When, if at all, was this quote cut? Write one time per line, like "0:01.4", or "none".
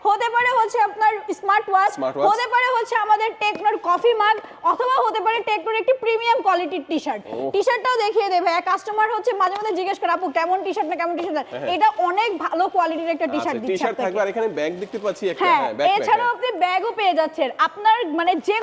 none